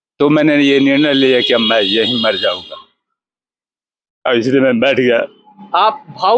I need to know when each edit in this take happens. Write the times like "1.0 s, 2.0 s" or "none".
none